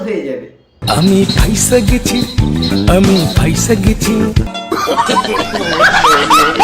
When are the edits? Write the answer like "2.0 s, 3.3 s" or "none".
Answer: 4.5 s